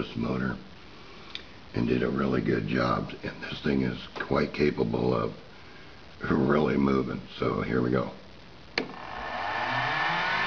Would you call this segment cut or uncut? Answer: cut